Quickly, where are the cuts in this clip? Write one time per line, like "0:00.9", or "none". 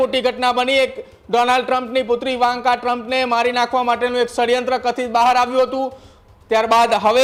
none